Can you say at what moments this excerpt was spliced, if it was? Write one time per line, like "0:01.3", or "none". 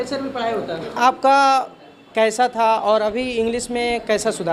0:01.0